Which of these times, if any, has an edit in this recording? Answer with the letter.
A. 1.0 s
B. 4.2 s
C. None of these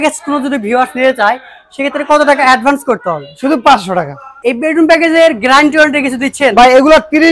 B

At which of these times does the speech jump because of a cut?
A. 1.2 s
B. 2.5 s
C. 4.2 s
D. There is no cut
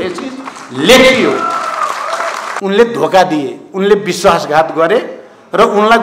B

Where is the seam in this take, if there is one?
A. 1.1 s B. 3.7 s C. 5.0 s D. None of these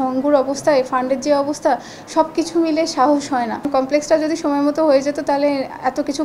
B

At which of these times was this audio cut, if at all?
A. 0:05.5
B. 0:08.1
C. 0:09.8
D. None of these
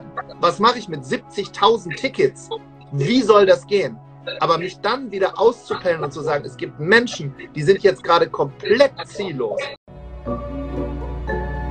C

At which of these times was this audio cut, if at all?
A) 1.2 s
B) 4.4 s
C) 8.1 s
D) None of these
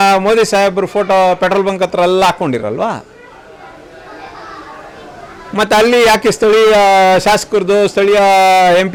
D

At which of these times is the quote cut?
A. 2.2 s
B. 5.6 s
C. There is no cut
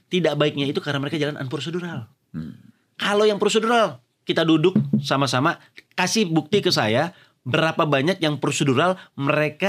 C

